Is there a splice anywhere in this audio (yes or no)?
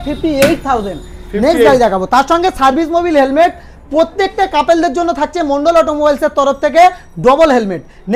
no